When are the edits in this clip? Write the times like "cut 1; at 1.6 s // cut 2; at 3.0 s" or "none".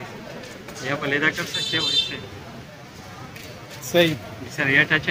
none